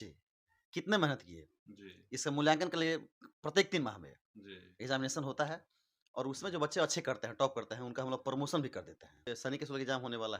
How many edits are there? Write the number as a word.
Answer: one